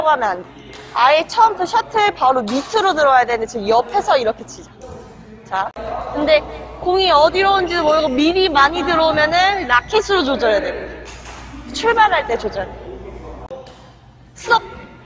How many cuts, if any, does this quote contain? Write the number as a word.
two